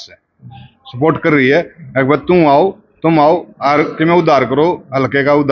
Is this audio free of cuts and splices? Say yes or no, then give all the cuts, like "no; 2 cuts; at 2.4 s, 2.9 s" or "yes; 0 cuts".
yes; 0 cuts